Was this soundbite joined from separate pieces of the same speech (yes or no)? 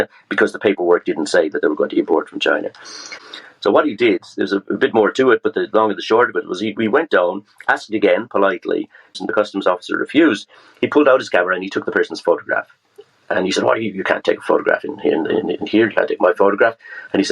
yes